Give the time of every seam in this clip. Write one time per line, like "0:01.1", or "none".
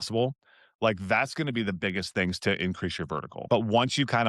0:03.3